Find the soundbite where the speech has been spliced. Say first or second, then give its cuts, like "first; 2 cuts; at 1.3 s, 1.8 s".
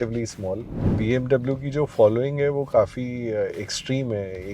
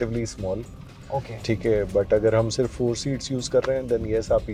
first; 1 cut; at 0.9 s